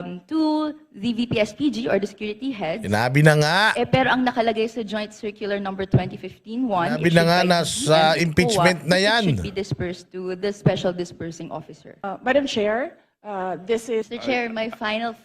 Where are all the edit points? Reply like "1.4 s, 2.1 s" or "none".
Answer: 12.0 s, 14.1 s